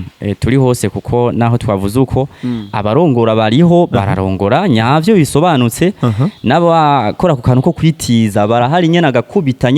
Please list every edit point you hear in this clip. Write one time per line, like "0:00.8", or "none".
none